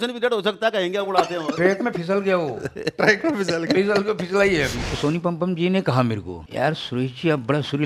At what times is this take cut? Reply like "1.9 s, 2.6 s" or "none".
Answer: 4.8 s, 6.4 s